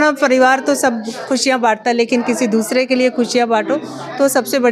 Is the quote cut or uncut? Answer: uncut